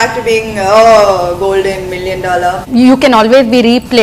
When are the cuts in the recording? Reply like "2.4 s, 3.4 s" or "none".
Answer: 2.6 s

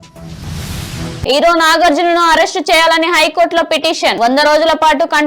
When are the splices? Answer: 1.2 s

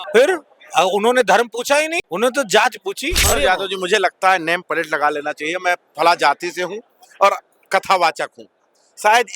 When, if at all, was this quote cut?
2.0 s, 3.1 s

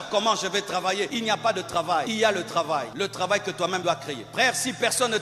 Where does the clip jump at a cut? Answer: 1.1 s, 2.1 s, 2.9 s, 3.9 s

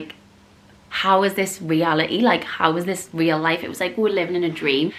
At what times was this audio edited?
none

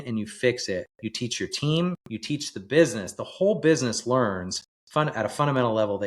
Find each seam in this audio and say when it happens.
1.0 s, 2.1 s

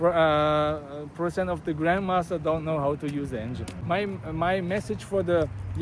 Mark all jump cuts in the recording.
3.7 s

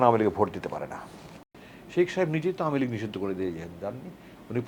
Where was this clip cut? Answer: 1.5 s

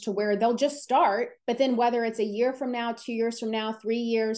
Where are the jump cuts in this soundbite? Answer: 1.3 s

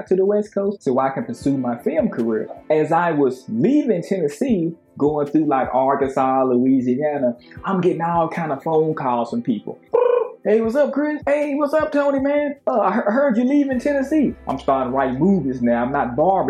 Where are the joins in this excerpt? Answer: 9.8 s, 14.4 s

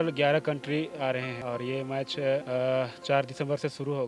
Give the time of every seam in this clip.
1.3 s, 2.4 s

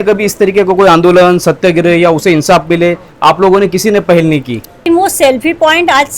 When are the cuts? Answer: 4.8 s

